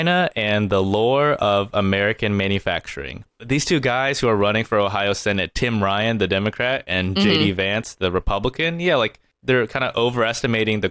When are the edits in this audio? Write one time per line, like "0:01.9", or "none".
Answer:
0:03.4
0:09.3

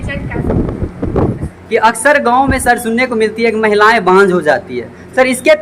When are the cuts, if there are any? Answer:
0:01.7

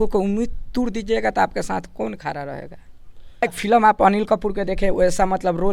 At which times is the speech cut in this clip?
0:03.5

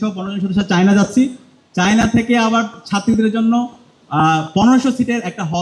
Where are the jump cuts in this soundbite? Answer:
none

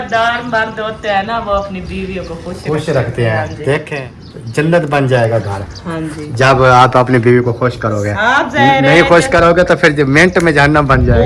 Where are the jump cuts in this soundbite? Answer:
0:03.9

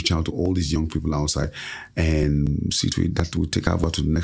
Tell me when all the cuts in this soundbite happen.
none

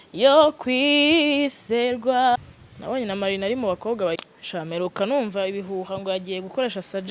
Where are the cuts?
0:02.4
0:04.3

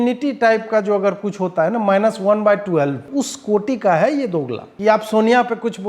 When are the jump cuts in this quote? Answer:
0:03.0
0:04.6

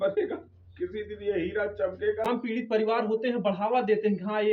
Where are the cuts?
0:02.2

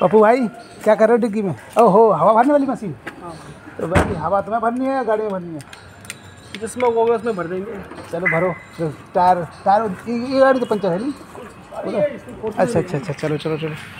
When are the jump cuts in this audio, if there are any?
none

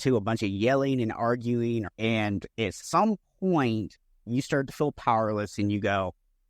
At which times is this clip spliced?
0:01.9

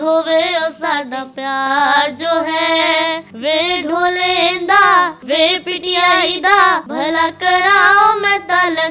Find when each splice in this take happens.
none

